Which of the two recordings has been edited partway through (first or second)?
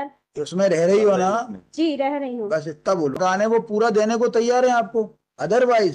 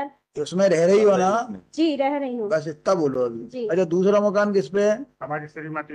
first